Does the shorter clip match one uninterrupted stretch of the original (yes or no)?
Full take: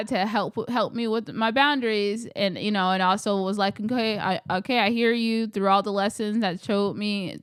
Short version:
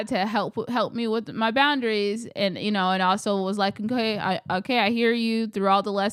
yes